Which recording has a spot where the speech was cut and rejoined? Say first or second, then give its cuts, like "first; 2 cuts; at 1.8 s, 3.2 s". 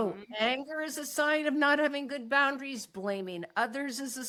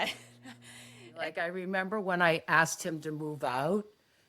second; 1 cut; at 1.1 s